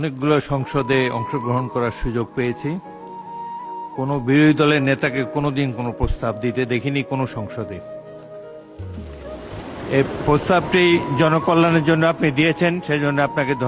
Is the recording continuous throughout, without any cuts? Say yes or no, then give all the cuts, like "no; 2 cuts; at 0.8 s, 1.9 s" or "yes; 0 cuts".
yes; 0 cuts